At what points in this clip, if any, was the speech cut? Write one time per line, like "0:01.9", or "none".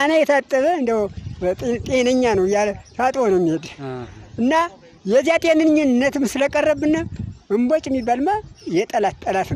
0:06.0